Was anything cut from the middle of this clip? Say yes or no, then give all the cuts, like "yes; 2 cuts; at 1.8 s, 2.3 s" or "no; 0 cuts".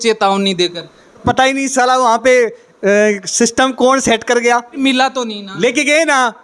yes; 2 cuts; at 1.2 s, 4.8 s